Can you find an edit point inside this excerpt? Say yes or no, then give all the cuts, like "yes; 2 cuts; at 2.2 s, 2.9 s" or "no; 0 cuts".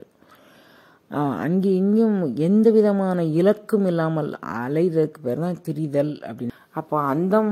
yes; 1 cut; at 6.6 s